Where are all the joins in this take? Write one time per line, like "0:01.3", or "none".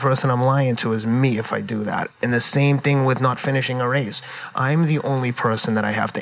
0:02.2